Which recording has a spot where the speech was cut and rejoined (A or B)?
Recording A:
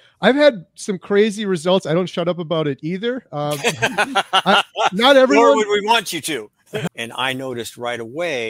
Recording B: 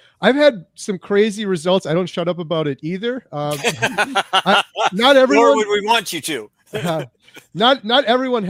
A